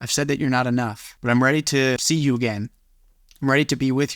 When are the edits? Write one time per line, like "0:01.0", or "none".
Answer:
0:01.1
0:02.0